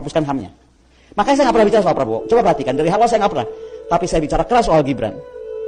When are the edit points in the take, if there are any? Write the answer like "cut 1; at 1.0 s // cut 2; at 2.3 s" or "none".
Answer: none